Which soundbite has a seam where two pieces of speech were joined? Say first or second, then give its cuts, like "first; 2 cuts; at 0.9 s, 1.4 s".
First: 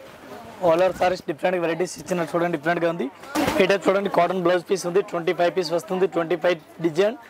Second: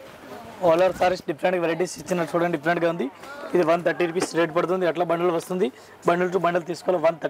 first; 1 cut; at 3.3 s